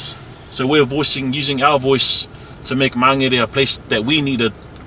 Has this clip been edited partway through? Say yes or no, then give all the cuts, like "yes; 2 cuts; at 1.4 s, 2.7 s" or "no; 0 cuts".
no; 0 cuts